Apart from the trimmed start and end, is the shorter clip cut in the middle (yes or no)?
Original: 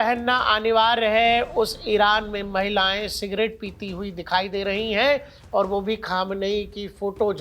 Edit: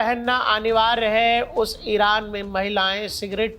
no